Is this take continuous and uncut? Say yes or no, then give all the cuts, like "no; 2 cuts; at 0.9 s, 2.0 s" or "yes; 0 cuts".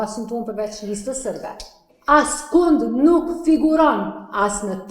no; 1 cut; at 2.0 s